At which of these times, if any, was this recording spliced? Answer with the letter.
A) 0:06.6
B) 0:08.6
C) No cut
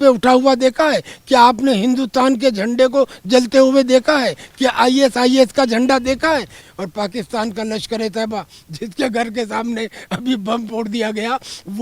A